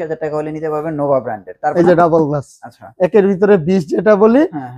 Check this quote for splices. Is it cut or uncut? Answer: cut